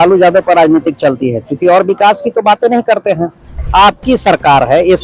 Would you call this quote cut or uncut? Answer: cut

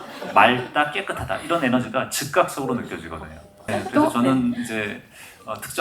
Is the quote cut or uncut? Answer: cut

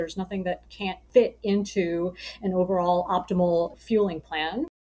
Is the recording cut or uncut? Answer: cut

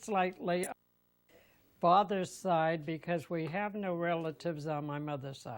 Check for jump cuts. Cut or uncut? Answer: cut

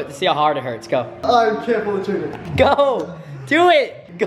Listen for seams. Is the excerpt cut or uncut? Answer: cut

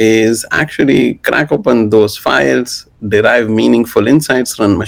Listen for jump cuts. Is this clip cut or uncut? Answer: uncut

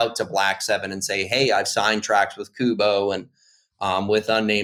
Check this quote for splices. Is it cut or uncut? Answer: uncut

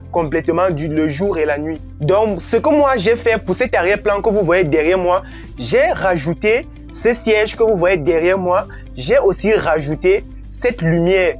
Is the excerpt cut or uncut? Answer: uncut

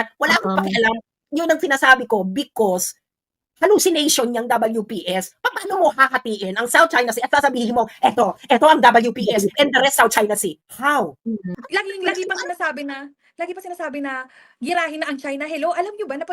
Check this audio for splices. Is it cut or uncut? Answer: cut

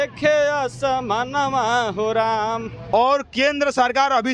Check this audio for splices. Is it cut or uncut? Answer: cut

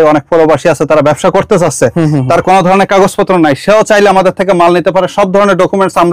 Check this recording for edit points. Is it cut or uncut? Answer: uncut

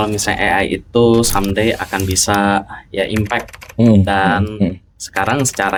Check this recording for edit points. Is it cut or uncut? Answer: uncut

